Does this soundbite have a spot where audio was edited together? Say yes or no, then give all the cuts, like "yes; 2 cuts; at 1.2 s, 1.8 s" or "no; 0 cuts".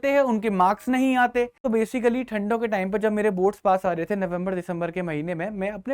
yes; 1 cut; at 1.6 s